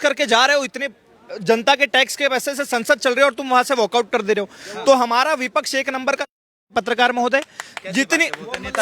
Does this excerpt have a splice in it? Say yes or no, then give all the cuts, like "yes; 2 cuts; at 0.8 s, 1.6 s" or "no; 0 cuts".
no; 0 cuts